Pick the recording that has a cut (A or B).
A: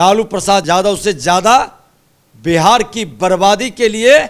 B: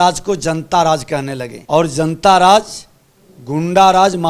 B